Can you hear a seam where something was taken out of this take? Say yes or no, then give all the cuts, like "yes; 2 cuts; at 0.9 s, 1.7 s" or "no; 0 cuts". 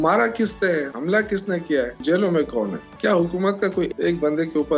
yes; 4 cuts; at 0.9 s, 2.0 s, 2.9 s, 3.9 s